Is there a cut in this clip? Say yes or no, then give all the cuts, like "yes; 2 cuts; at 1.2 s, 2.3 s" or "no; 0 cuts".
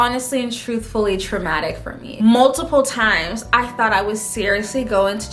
yes; 1 cut; at 2.0 s